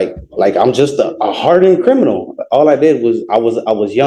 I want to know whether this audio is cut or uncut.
uncut